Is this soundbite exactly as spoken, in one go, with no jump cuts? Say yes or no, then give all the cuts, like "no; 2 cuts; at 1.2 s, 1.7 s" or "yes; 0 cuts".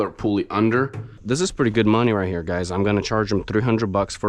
no; 1 cut; at 1.2 s